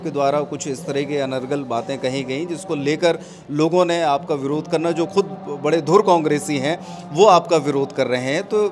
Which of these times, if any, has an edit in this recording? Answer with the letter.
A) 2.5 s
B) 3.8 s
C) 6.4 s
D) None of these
D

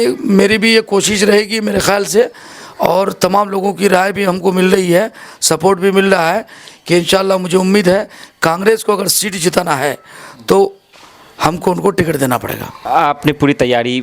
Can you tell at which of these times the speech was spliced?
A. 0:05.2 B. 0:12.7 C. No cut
B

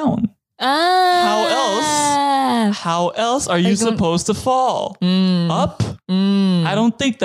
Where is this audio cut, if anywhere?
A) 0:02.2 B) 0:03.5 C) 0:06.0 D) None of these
D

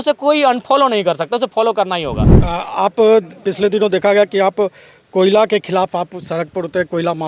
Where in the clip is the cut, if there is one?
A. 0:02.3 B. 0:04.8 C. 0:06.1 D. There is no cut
A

